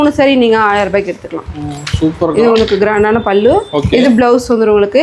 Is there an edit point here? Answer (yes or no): no